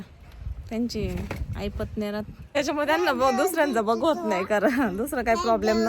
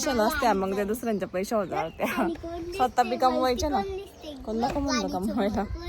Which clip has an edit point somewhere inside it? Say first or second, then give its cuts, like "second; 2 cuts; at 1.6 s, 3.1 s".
first; 1 cut; at 2.6 s